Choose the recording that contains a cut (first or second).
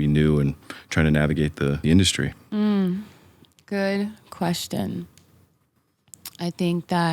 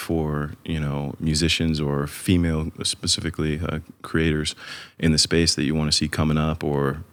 first